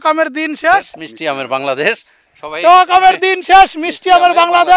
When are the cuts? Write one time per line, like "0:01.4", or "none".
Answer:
none